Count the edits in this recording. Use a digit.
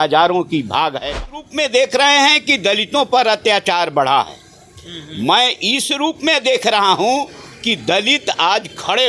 1